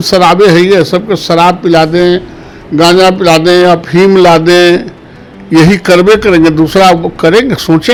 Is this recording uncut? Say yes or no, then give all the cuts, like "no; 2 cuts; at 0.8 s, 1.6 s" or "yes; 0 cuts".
yes; 0 cuts